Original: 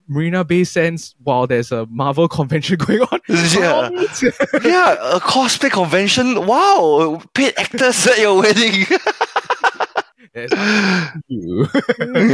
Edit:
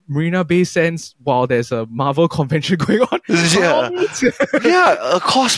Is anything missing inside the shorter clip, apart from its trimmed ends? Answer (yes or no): no